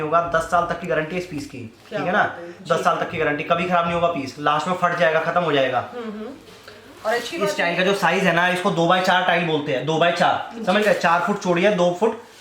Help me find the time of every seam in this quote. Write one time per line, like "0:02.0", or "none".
0:07.5